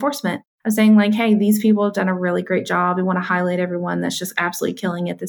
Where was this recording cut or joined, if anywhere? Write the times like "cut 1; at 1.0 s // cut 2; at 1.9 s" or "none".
none